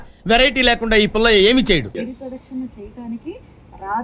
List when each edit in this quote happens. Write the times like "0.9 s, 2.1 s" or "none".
1.9 s